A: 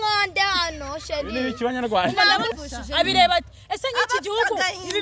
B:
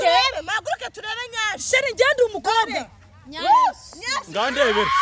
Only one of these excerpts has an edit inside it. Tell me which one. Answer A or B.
A